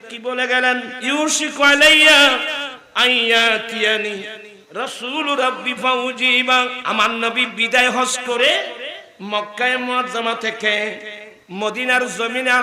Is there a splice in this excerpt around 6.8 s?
yes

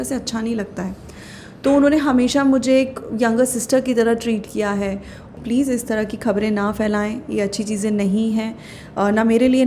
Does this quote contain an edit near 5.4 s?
yes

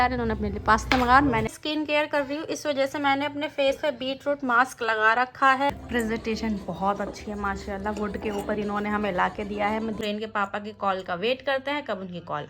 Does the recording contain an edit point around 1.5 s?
yes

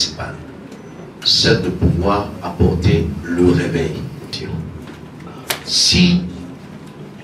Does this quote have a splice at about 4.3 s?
yes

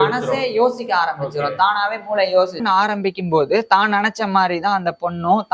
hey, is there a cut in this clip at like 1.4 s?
no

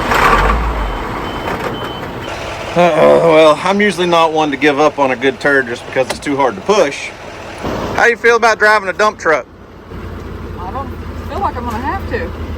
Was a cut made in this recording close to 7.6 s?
yes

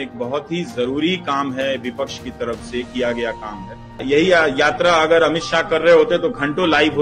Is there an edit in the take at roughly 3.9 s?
yes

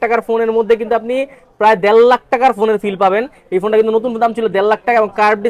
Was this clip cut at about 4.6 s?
no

